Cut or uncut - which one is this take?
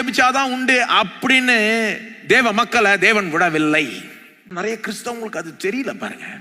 cut